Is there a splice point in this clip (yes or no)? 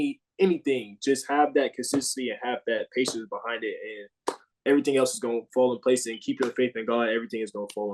no